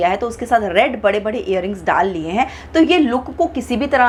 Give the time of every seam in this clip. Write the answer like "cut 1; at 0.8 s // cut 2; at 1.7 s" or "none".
none